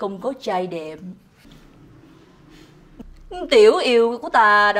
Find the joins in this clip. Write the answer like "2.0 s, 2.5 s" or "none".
1.3 s, 3.0 s